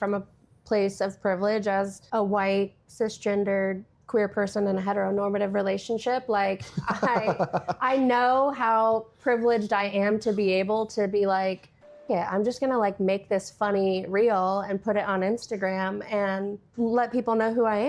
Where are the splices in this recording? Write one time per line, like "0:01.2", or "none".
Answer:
0:02.0
0:03.9
0:12.0
0:16.7